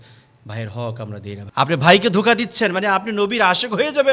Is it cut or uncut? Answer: cut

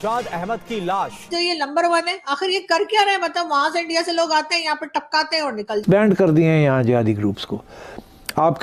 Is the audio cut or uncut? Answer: cut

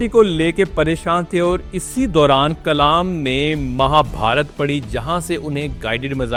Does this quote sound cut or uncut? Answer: uncut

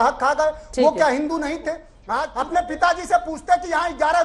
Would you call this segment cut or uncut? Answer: cut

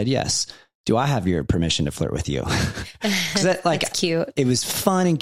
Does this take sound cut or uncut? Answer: uncut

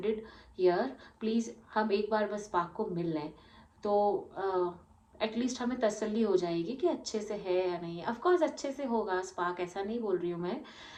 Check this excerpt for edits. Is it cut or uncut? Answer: uncut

